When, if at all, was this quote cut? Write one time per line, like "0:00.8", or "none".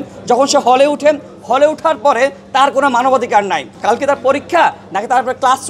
0:03.7